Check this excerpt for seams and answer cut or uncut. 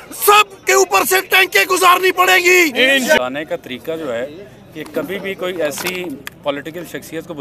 cut